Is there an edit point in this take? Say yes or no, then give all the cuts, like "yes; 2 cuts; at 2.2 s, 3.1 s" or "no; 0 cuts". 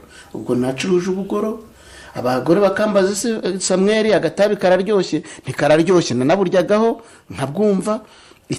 no; 0 cuts